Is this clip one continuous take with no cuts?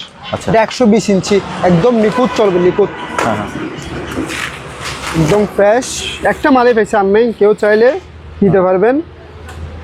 yes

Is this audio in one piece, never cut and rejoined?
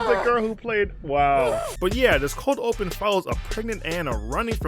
yes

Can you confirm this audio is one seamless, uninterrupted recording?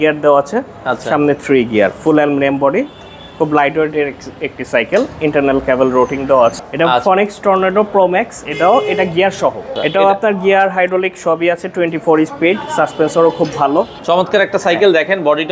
no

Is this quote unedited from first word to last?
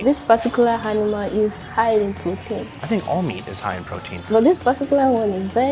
no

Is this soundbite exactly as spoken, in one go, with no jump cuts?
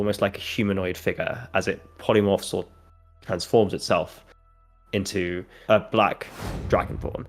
no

